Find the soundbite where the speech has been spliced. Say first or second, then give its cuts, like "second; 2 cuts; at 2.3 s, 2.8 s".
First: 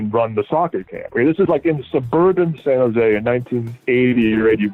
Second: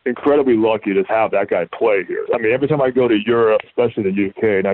second; 3 cuts; at 1.1 s, 2.2 s, 3.6 s